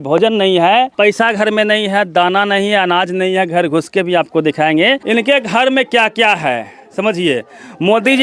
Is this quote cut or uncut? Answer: cut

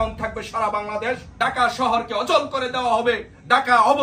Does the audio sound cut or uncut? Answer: cut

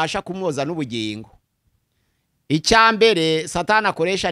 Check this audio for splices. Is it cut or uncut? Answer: uncut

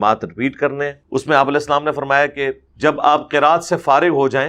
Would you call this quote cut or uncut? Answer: cut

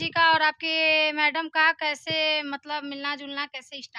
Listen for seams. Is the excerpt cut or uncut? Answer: uncut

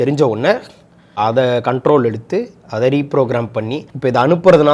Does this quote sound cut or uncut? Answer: cut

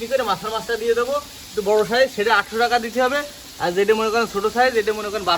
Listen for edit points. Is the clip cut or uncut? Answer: uncut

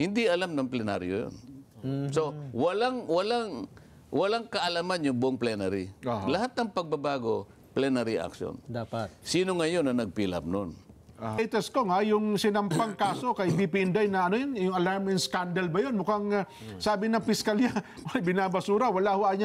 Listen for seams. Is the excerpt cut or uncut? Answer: cut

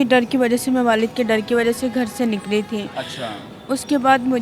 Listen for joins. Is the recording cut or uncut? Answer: uncut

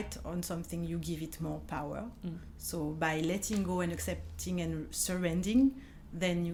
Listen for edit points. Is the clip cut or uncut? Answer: uncut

